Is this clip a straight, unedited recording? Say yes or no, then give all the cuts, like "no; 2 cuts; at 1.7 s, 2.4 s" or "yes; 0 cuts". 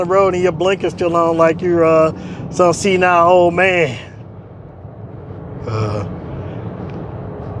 yes; 0 cuts